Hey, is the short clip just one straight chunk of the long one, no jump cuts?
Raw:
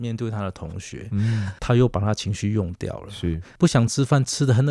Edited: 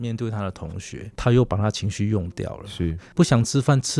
no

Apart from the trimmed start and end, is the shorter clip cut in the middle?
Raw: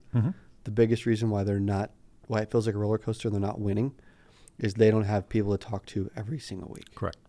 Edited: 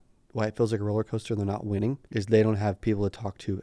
yes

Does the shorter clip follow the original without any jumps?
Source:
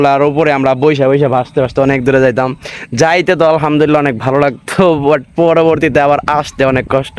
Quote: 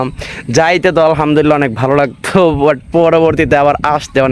yes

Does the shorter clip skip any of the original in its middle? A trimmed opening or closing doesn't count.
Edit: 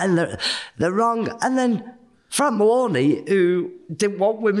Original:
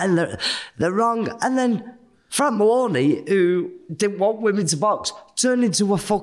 no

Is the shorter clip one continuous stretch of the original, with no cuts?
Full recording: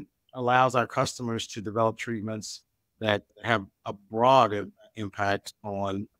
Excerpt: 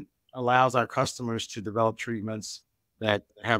yes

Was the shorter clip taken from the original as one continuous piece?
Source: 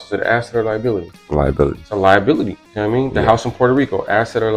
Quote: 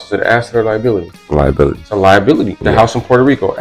no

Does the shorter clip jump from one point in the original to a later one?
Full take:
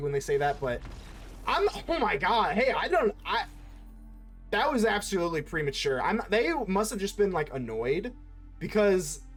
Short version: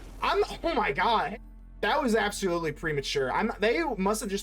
yes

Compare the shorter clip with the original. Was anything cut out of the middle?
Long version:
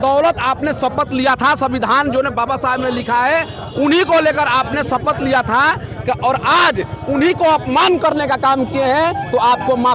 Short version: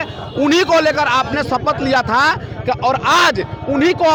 no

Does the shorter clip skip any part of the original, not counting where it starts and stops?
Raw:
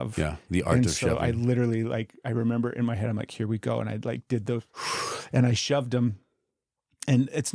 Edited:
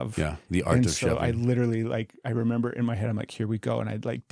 no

